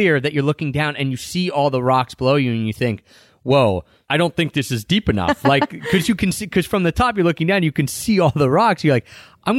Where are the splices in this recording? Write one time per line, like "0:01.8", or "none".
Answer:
0:03.9